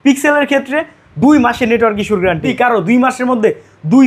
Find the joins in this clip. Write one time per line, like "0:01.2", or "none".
0:02.5

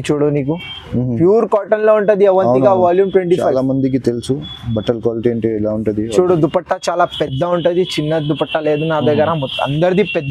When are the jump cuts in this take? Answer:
none

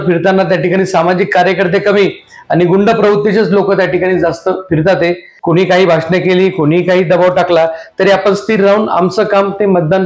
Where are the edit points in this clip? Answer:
0:05.3

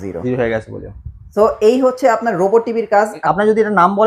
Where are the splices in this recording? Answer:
0:03.2

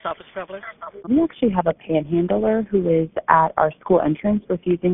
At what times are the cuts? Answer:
0:01.1

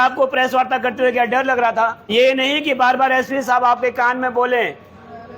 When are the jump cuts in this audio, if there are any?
0:02.0

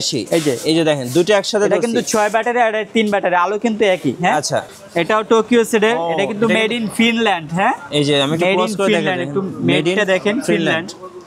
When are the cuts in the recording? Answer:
0:04.7

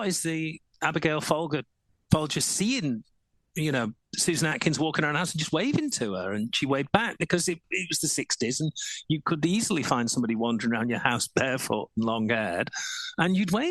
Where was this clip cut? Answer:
none

